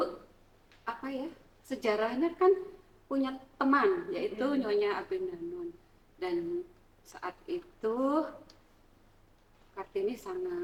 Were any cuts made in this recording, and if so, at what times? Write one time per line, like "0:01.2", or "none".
none

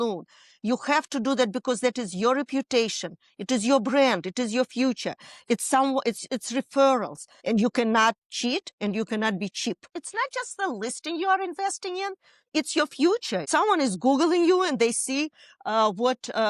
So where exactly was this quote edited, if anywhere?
0:07.3
0:10.0
0:13.5

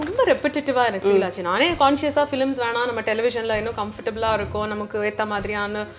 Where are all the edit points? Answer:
none

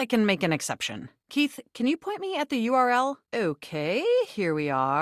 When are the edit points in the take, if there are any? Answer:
0:01.1
0:03.2

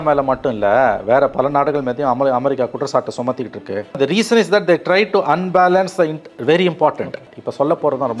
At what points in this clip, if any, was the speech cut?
0:04.0
0:07.2

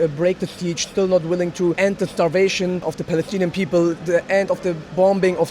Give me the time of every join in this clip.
0:01.8
0:02.8

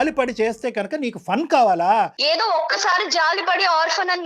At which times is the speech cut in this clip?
0:02.2

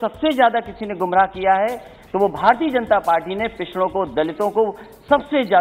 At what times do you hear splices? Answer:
none

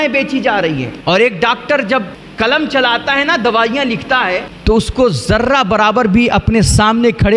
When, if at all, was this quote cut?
0:00.9
0:02.2
0:04.5

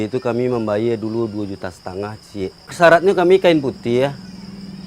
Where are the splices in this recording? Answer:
0:02.7

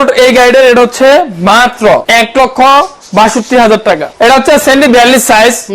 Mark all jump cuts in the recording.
0:02.0
0:04.1

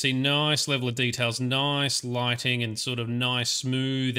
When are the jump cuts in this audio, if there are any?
none

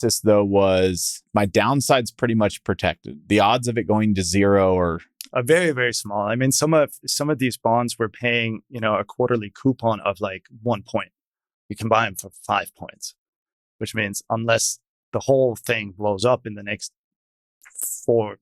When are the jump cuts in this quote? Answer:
0:01.2

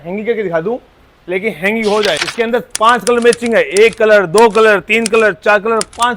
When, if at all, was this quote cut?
0:02.2

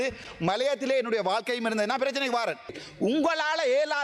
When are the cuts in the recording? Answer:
0:02.8

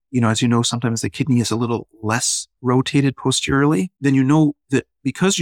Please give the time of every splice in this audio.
0:03.9

